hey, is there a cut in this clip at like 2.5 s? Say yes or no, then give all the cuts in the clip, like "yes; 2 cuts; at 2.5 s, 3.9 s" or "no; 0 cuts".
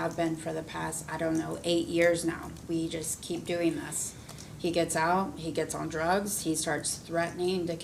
no; 0 cuts